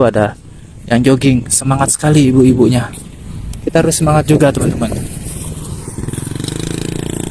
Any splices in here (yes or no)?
no